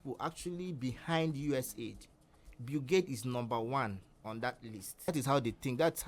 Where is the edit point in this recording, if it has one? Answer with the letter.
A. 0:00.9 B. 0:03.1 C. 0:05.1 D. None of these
C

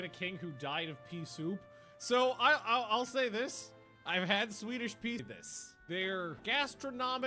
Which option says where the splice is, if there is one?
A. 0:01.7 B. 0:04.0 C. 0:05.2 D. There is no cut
C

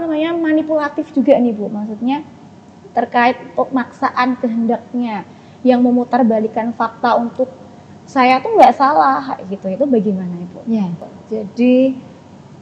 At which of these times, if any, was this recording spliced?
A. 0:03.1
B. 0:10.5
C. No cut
C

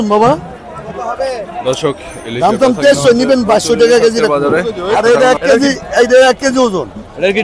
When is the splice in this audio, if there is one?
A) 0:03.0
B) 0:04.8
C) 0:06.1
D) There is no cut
B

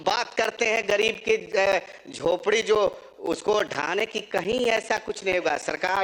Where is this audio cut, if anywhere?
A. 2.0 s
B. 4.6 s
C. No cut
C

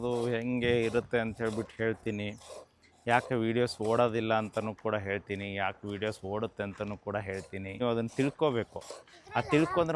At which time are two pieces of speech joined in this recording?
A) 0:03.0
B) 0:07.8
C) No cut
B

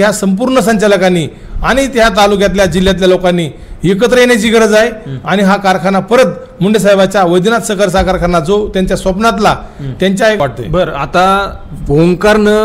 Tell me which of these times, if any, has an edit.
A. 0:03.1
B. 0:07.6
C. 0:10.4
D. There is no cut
C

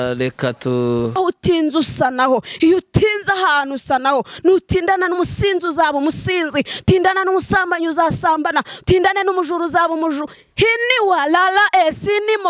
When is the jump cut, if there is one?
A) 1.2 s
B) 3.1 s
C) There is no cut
A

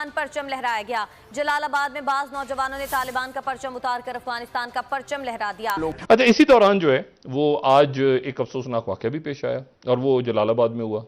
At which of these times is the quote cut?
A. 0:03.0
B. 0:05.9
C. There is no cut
B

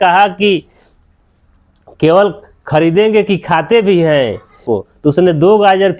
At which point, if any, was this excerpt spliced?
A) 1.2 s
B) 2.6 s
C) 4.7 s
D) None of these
C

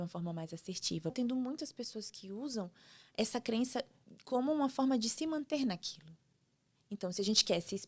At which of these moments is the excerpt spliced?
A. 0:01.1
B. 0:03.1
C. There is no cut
A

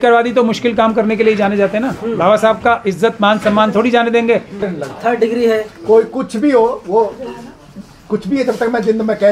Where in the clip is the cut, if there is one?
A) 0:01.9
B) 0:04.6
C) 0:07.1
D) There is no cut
B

